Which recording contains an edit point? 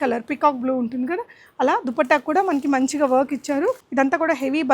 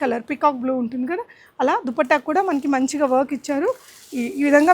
first; 1 cut; at 3.8 s

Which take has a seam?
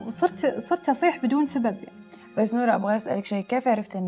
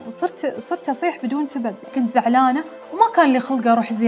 second; 1 cut; at 1.9 s

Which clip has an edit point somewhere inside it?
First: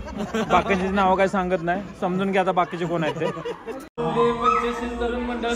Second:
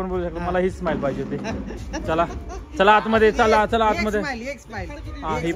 first; 1 cut; at 3.9 s

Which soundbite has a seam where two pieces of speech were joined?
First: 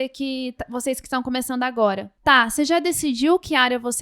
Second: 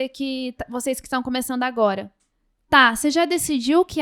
first; 1 cut; at 2.1 s

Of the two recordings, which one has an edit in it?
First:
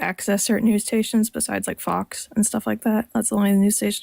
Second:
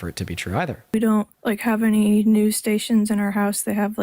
second; 1 cut; at 0.9 s

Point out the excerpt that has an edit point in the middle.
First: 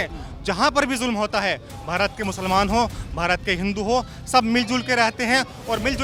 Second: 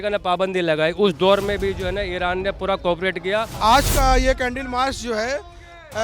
second; 1 cut; at 3.5 s

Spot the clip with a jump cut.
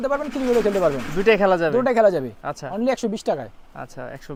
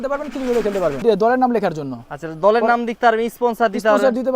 second; 1 cut; at 1.0 s

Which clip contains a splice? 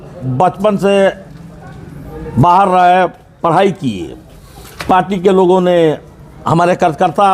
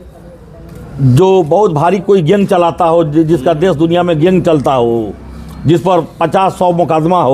first; 1 cut; at 4.8 s

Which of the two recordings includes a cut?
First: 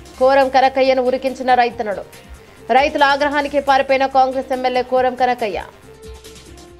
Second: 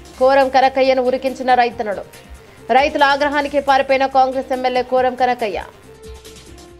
second; 1 cut; at 5.8 s

